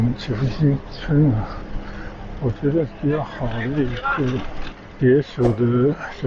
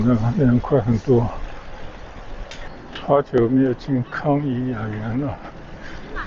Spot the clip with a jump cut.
second; 1 cut; at 2.7 s

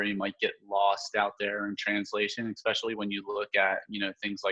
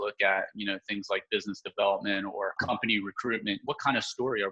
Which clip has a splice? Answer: second; 2 cuts; at 2.6 s, 3.6 s

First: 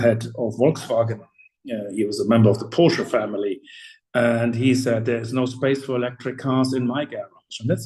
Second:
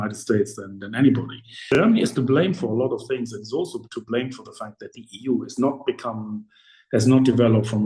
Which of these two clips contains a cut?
second; 1 cut; at 1.7 s

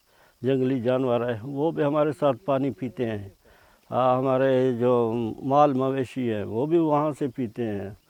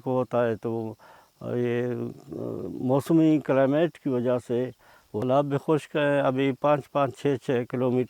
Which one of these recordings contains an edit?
second; 1 cut; at 5.2 s

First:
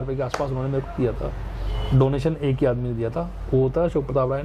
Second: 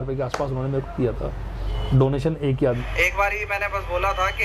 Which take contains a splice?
second; 1 cut; at 2.9 s

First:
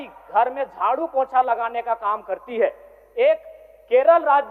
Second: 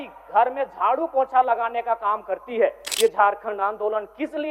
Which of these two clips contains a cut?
second; 1 cut; at 2.8 s

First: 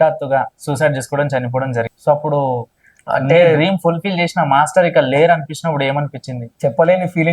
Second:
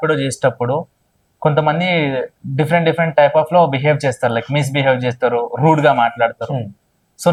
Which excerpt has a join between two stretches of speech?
first; 2 cuts; at 1.9 s, 6.4 s

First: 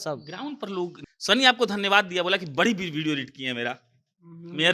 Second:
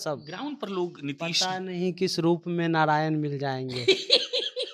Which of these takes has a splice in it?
first; 1 cut; at 1.0 s

